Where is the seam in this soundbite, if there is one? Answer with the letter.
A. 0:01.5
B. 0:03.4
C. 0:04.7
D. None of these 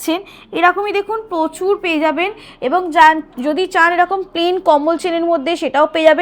D